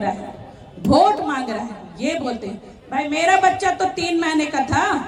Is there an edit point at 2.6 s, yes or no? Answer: no